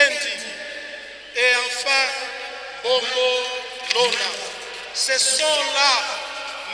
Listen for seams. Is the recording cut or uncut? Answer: uncut